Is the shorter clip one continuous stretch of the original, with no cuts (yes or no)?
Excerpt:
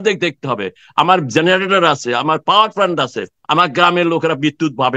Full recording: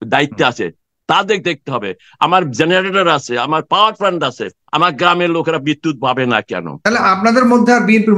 yes